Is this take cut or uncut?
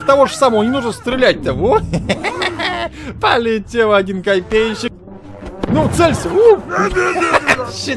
cut